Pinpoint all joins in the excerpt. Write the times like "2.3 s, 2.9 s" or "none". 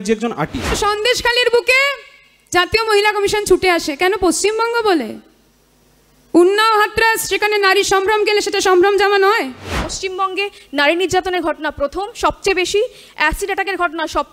0.8 s, 9.9 s